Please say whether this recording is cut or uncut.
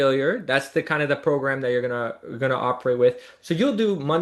cut